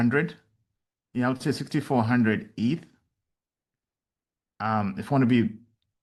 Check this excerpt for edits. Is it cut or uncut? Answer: uncut